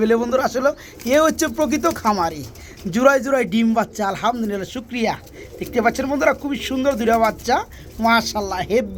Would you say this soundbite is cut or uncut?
uncut